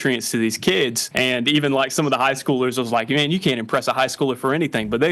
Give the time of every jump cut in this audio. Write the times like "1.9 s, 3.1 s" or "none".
1.0 s